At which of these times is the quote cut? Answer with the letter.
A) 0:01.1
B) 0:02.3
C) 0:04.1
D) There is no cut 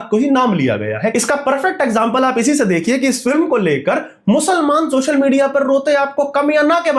A